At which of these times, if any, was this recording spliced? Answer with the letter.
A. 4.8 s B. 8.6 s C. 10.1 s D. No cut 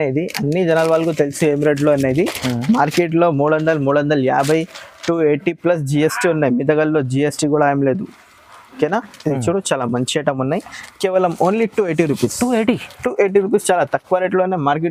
D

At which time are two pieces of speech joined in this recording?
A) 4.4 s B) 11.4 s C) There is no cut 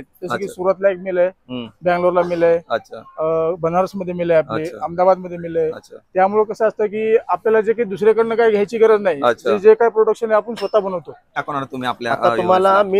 B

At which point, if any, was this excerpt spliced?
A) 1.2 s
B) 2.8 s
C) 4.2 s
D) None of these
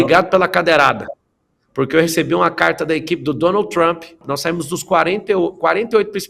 C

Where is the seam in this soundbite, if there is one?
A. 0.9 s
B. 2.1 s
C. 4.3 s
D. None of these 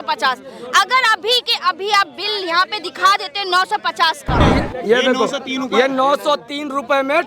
C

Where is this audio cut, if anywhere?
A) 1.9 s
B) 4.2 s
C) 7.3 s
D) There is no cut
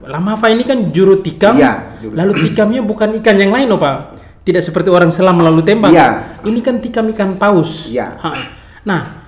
D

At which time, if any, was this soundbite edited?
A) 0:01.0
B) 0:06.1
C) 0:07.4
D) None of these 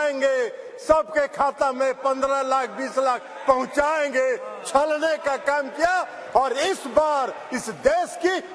D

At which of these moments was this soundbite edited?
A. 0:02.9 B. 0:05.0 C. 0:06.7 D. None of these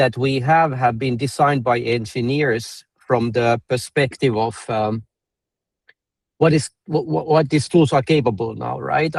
D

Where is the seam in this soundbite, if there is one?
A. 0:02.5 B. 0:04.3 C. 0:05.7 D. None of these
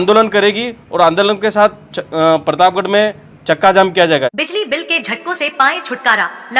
B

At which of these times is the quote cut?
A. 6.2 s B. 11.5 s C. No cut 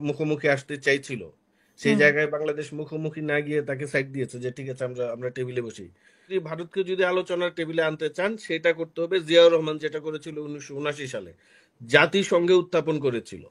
A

